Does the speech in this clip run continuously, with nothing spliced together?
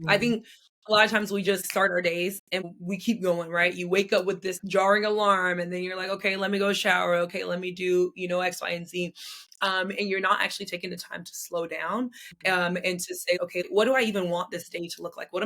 no; 4 cuts; at 1.7 s, 2.7 s, 4.5 s, 13.6 s

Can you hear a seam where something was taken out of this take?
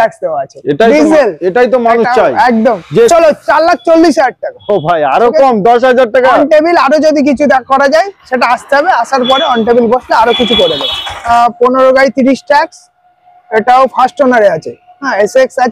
yes; 2 cuts; at 3.1 s, 11.3 s

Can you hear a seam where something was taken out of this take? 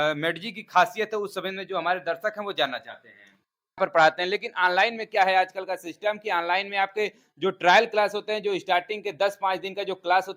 yes; 1 cut; at 3.8 s

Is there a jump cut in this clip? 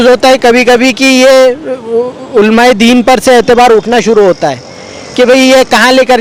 no; 0 cuts

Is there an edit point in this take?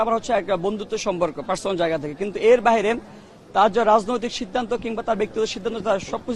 no; 0 cuts

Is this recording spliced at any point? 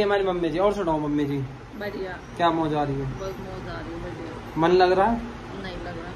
no; 0 cuts

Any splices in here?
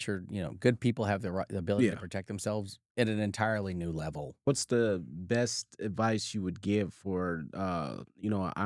yes; 1 cut; at 4.5 s

